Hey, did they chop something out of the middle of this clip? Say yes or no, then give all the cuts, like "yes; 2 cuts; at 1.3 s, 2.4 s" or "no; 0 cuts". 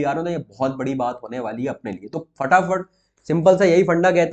no; 0 cuts